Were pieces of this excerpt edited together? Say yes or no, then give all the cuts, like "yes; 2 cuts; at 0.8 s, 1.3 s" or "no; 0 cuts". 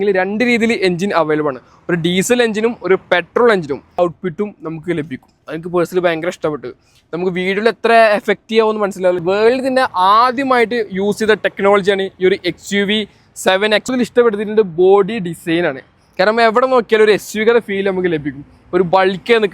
yes; 3 cuts; at 4.0 s, 9.2 s, 13.9 s